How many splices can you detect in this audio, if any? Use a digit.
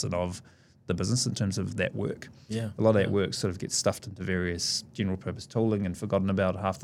0